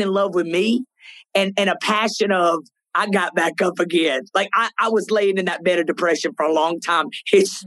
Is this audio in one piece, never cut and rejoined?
yes; 0 cuts

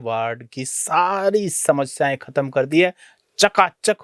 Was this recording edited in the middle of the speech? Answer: no; 0 cuts

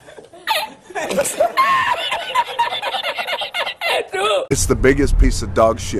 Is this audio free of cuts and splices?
no; 1 cut; at 4.5 s

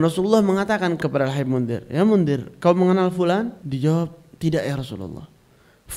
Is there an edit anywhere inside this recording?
yes; 2 cuts; at 1.0 s, 3.6 s

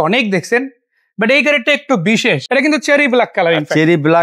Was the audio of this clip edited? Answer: yes; 1 cut; at 2.4 s

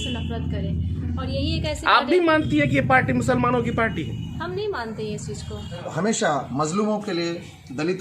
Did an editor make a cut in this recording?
yes; 1 cut; at 5.9 s

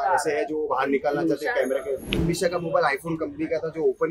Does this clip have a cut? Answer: yes; 1 cut; at 2.2 s

